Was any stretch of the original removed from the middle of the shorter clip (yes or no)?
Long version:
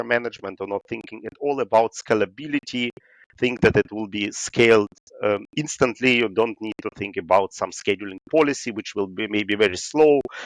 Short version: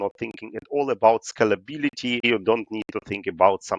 yes